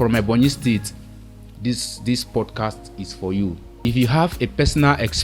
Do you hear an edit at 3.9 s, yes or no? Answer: yes